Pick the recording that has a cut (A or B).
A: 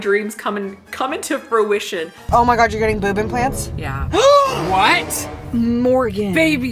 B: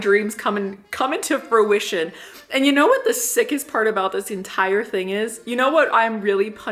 A